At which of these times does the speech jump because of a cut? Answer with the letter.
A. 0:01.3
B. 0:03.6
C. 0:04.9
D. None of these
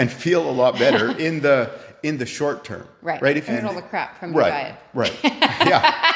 B